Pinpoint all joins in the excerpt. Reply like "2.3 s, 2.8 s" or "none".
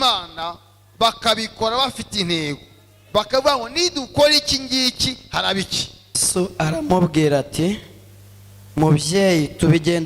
6.2 s

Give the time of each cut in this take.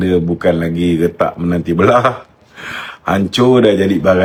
none

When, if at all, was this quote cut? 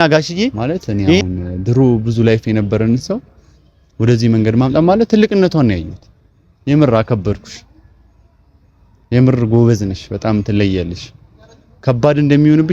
1.2 s

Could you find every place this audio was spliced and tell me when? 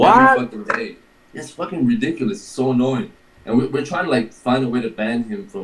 3.7 s

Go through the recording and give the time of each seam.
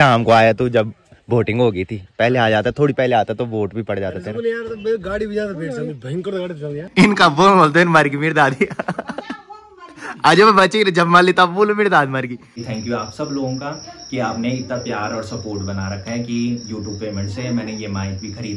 6.9 s, 12.6 s

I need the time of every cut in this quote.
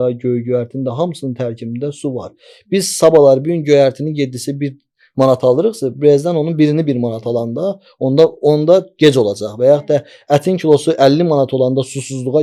none

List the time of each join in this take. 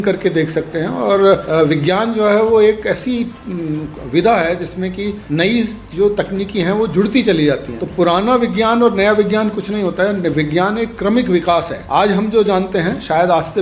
1.4 s, 5.2 s, 7.8 s, 11.8 s

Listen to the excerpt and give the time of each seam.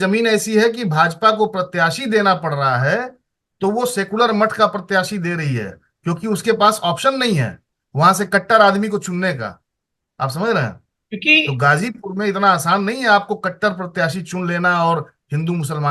none

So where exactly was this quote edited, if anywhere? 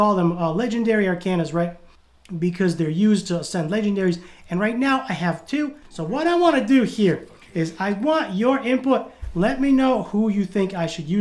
5.8 s

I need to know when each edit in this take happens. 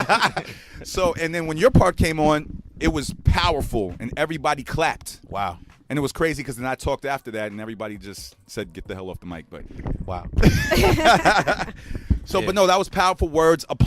2.5 s

